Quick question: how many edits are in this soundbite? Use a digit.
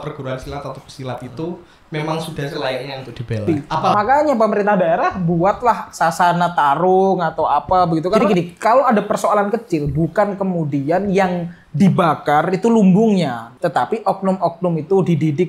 3